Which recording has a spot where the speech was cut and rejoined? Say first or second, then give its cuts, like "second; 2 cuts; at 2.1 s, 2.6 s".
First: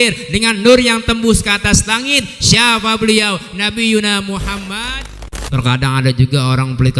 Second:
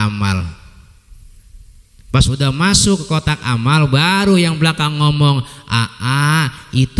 first; 1 cut; at 5.4 s